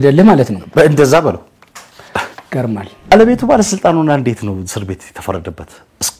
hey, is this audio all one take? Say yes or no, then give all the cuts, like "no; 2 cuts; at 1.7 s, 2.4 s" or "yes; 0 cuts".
no; 1 cut; at 3.1 s